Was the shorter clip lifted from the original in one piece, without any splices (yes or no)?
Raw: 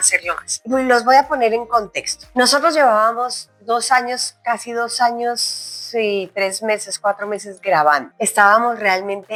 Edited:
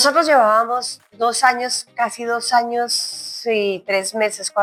yes